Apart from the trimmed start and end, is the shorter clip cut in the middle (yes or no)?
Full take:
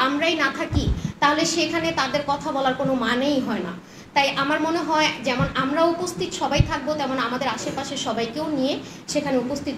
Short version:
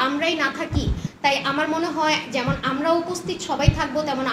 yes